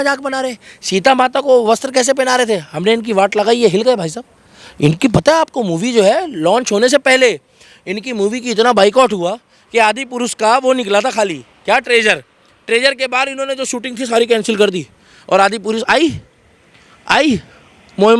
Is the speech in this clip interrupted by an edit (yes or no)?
no